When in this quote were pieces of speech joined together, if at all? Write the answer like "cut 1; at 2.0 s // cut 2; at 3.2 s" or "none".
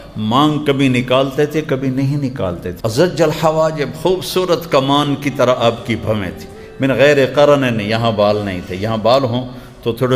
cut 1; at 2.7 s